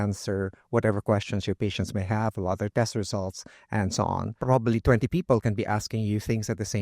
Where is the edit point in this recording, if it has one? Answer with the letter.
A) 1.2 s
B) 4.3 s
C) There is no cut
B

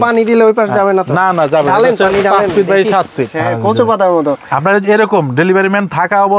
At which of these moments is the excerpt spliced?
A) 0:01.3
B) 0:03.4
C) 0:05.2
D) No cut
B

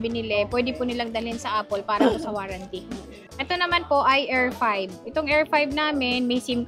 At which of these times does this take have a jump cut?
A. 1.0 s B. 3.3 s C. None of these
C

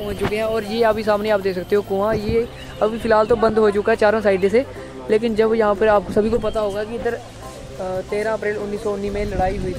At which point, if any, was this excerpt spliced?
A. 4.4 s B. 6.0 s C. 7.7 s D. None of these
D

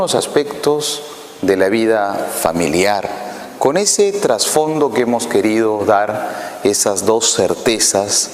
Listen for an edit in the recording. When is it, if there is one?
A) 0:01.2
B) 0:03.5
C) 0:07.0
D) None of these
B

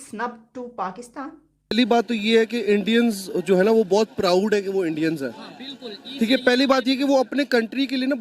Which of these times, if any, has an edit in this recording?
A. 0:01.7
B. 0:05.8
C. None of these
A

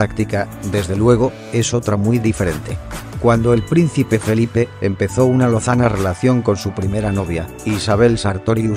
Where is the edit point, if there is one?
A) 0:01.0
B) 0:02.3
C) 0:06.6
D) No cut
D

